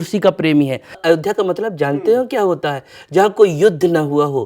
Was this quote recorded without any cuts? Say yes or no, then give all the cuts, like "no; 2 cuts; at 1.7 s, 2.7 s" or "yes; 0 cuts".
no; 1 cut; at 1.0 s